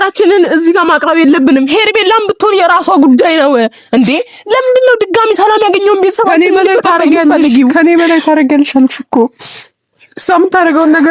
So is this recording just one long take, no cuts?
yes; 0 cuts

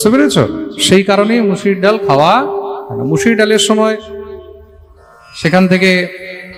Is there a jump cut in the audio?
no; 0 cuts

